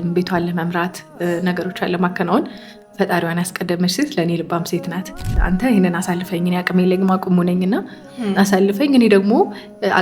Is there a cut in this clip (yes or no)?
yes